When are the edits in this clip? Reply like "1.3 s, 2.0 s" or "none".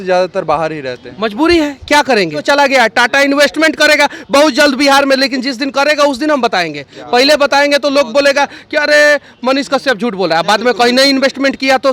2.4 s